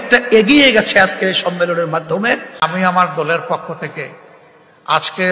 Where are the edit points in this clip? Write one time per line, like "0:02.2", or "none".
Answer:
0:02.6